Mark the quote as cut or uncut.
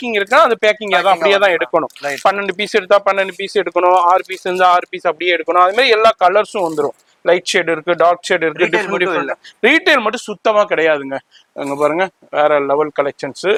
uncut